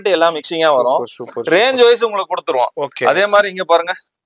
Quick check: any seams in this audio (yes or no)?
no